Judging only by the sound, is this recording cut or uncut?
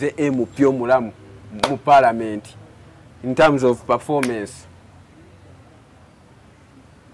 uncut